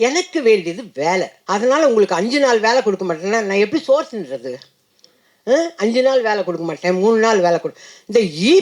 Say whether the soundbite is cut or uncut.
cut